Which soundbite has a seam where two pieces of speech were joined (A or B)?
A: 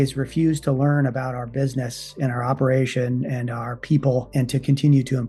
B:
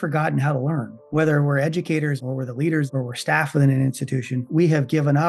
B